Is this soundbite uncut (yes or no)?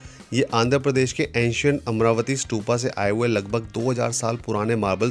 yes